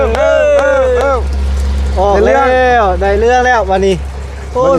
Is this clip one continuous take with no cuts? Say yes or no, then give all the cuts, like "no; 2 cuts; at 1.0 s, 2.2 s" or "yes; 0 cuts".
yes; 0 cuts